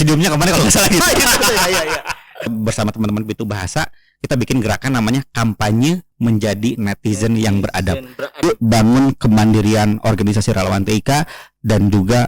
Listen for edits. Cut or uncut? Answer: cut